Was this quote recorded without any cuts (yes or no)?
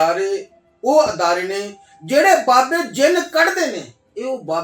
yes